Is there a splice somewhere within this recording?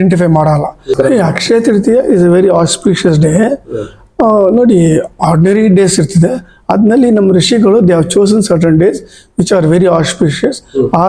yes; 1 cut; at 0.9 s

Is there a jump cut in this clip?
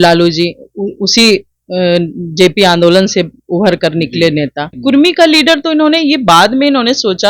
yes; 1 cut; at 4.7 s

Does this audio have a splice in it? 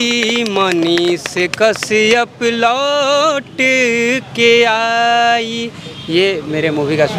no; 0 cuts

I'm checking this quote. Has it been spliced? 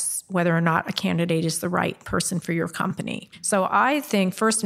yes; 1 cut; at 3.3 s

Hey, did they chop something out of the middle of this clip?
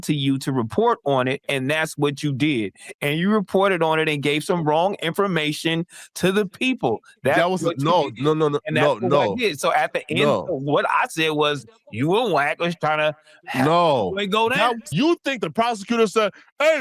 yes; 1 cut; at 14.8 s

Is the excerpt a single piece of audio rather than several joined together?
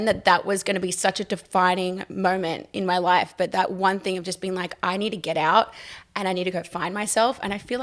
yes; 0 cuts

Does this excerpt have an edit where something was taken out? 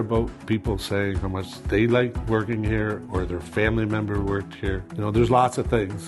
yes; 3 cuts; at 1.5 s, 2.2 s, 4.9 s

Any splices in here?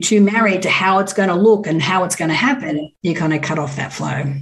yes; 1 cut; at 2.9 s

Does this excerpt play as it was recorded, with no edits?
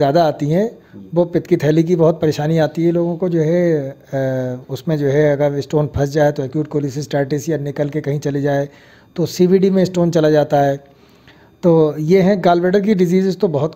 yes; 0 cuts

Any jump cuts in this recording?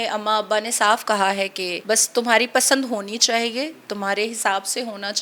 yes; 1 cut; at 1.7 s

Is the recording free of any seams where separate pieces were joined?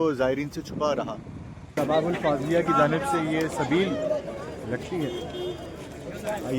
no; 1 cut; at 1.7 s

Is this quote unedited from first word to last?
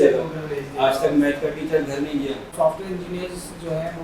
no; 1 cut; at 2.5 s

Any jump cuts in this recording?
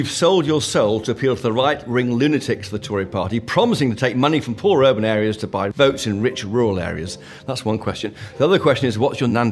no; 0 cuts

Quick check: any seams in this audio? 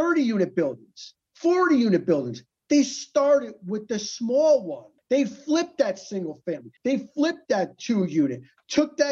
no; 0 cuts

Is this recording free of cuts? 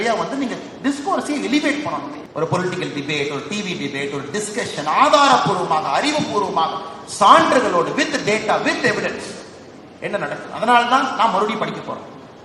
no; 1 cut; at 2.2 s

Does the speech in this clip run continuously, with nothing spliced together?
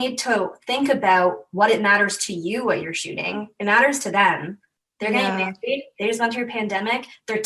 yes; 0 cuts

